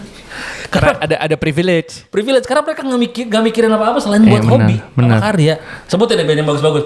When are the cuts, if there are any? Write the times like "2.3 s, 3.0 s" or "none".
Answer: 5.8 s